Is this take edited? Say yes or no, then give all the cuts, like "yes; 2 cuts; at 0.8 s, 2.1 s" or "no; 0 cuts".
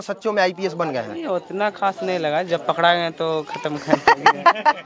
no; 0 cuts